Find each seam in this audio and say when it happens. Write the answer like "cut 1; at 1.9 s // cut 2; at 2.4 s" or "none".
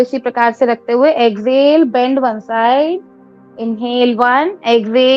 none